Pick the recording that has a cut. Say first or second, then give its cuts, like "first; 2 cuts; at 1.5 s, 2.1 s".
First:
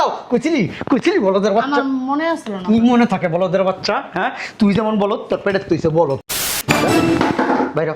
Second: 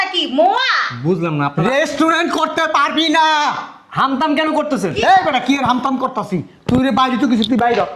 first; 1 cut; at 6.3 s